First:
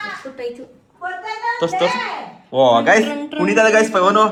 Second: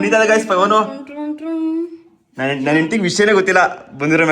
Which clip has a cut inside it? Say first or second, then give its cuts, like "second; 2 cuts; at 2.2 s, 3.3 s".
second; 1 cut; at 2.1 s